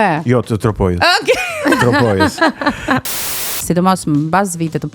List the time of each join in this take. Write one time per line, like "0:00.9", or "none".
0:03.1